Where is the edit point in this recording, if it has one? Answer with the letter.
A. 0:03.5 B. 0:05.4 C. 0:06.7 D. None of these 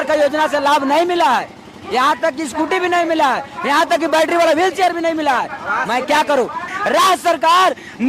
C